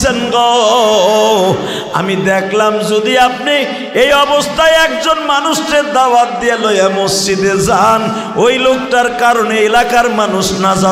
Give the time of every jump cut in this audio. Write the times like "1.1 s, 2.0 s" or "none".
none